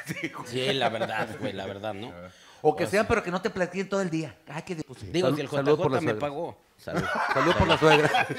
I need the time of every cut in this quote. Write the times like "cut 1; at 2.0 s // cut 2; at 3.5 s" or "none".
cut 1; at 4.8 s